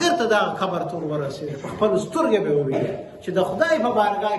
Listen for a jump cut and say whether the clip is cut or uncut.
cut